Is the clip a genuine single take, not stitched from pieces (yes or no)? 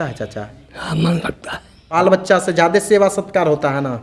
no